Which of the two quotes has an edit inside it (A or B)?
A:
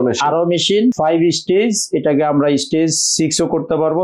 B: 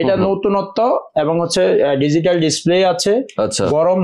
A